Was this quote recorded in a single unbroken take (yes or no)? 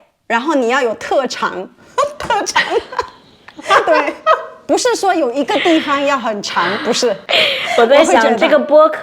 no